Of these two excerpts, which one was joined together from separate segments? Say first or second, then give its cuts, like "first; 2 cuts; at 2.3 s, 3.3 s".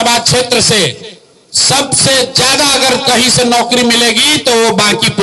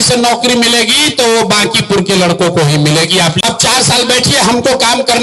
second; 1 cut; at 3.4 s